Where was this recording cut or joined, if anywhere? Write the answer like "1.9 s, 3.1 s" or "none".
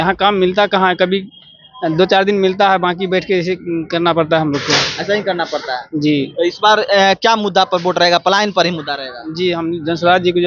none